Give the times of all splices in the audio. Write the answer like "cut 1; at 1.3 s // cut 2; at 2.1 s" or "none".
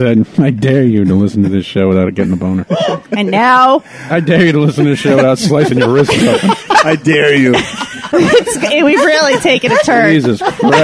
cut 1; at 8.1 s